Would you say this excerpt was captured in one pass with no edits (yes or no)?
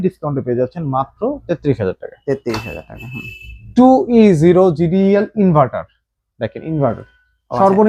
yes